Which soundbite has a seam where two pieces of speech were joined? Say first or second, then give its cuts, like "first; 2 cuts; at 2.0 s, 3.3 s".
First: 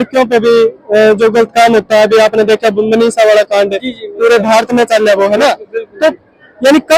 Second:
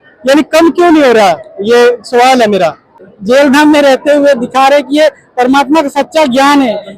second; 1 cut; at 3.0 s